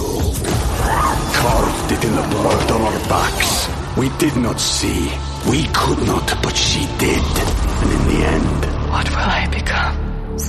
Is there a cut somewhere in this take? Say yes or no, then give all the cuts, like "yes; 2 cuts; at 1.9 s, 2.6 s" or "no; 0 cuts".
no; 0 cuts